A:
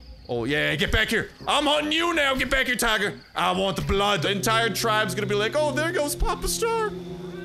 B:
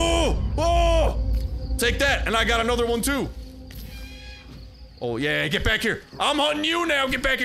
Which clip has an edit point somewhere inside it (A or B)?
A